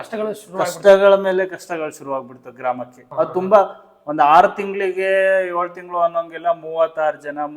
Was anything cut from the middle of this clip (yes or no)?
yes